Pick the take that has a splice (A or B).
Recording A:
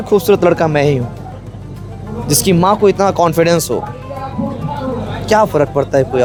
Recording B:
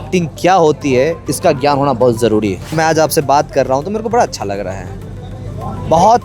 B